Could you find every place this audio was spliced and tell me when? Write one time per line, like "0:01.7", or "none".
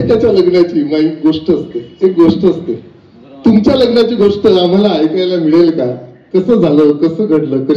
none